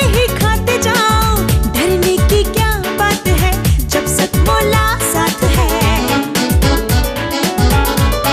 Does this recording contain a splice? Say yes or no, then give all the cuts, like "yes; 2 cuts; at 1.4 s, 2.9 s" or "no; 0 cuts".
no; 0 cuts